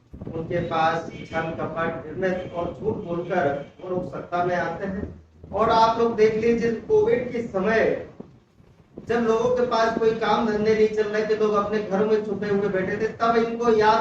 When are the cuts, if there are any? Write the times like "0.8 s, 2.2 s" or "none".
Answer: none